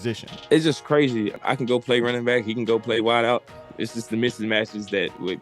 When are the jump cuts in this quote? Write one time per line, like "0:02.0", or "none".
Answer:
0:01.3